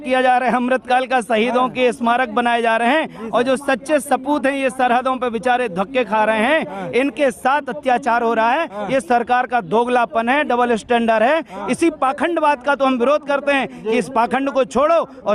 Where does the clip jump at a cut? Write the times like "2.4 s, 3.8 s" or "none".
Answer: none